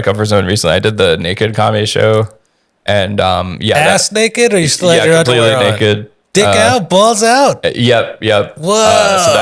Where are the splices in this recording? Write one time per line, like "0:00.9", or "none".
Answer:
none